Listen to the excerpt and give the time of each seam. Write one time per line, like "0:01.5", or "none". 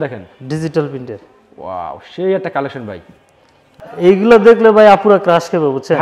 0:03.8